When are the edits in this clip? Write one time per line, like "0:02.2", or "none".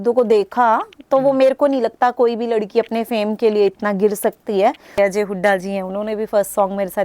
0:05.0